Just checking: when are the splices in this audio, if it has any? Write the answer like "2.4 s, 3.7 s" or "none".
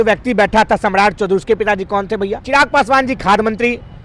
2.4 s